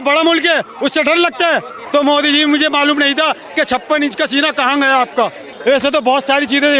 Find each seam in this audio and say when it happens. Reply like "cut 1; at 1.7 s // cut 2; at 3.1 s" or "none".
cut 1; at 1.8 s // cut 2; at 5.5 s